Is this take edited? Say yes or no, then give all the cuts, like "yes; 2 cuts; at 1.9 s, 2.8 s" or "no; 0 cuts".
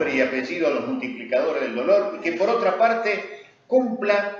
yes; 1 cut; at 1.6 s